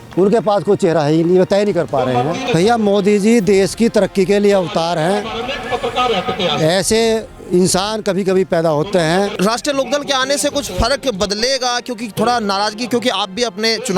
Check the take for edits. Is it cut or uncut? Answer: cut